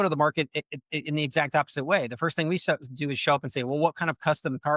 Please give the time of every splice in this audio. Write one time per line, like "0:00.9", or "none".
none